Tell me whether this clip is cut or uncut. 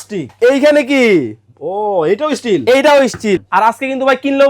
cut